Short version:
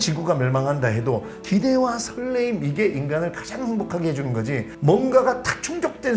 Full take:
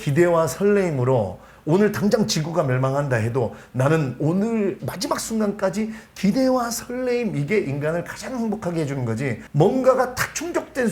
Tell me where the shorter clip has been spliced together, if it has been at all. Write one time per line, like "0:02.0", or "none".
0:01.3